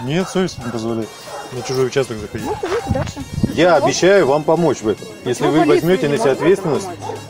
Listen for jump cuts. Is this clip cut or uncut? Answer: cut